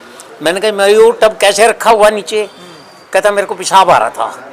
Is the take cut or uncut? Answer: uncut